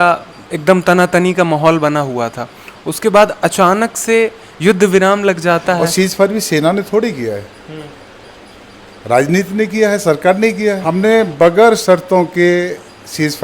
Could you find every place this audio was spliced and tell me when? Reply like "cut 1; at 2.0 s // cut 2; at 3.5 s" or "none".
cut 1; at 5.8 s // cut 2; at 10.8 s